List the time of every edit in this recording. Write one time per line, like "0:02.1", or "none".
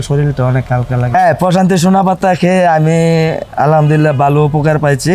0:01.1